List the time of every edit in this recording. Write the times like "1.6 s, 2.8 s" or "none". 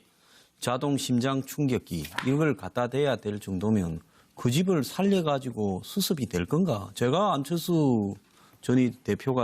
5.1 s